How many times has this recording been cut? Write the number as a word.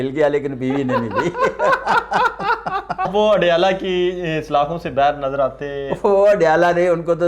one